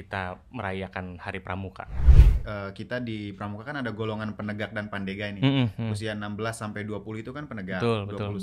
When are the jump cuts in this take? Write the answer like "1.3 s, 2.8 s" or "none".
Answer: 2.3 s